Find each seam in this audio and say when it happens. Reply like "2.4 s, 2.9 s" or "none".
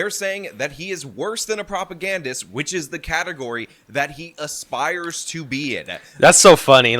none